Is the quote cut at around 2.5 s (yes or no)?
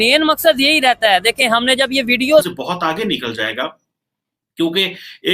yes